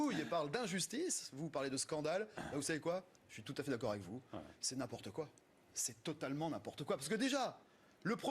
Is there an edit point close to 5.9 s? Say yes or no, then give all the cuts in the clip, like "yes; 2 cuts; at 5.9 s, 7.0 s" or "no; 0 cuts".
yes; 1 cut; at 5.9 s